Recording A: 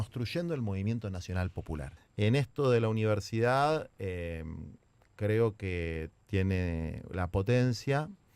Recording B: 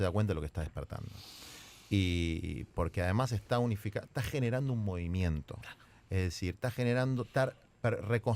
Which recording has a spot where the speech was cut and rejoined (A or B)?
A